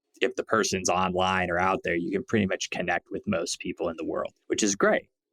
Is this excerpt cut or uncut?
cut